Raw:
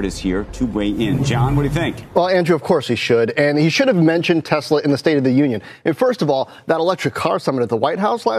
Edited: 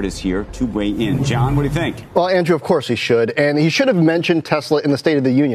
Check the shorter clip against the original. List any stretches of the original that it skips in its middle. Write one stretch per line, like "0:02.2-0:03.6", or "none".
none